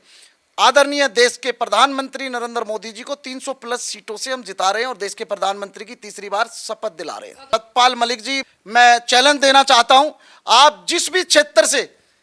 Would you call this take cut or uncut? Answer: cut